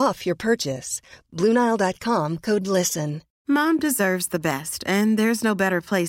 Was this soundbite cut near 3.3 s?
yes; 1 cut; at 3.3 s

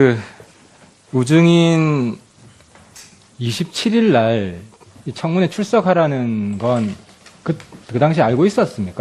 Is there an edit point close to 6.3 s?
no; 0 cuts

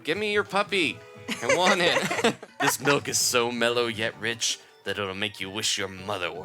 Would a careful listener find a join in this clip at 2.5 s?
yes; 1 cut; at 2.5 s

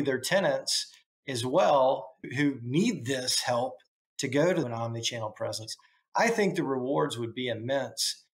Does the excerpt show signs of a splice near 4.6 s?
yes; 1 cut; at 4.6 s

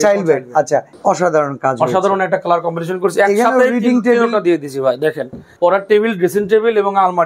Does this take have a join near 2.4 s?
no; 2 cuts; at 0.9 s, 5.4 s

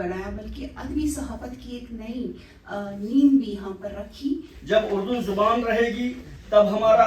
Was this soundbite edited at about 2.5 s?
no; 1 cut; at 4.5 s

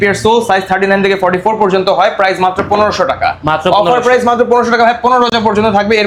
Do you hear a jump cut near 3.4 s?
no; 0 cuts

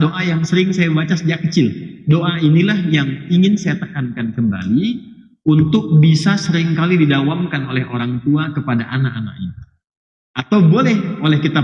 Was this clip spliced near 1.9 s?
yes; 1 cut; at 1.9 s

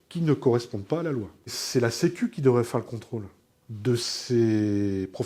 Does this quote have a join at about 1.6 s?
yes; 1 cut; at 1.6 s

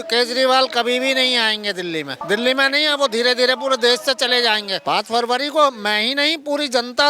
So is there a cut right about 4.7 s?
yes; 2 cuts; at 2.2 s, 4.7 s

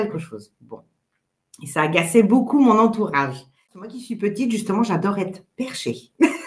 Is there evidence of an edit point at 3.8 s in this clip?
yes; 1 cut; at 3.8 s

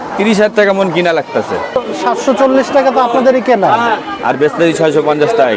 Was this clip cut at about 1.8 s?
yes; 1 cut; at 1.8 s

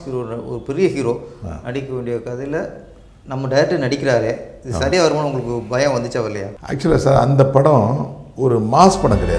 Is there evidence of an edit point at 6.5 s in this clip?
yes; 1 cut; at 6.5 s

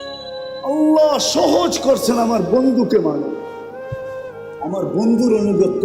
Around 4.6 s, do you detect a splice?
yes; 2 cuts; at 3.4 s, 4.6 s

